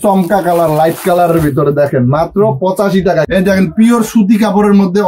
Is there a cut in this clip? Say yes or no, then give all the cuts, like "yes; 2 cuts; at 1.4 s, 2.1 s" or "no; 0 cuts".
yes; 1 cut; at 3.3 s